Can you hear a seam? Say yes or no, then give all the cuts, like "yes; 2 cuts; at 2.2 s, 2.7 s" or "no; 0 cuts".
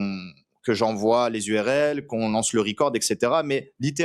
no; 0 cuts